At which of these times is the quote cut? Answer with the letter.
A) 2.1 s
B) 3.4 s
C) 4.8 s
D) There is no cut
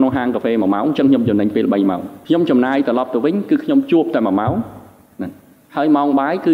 A